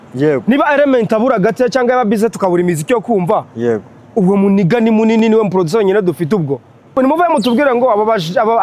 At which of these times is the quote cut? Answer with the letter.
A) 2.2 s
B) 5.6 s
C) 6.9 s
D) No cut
C